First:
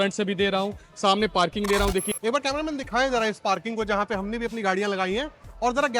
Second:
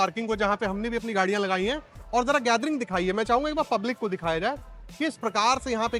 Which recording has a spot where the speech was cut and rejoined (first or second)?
first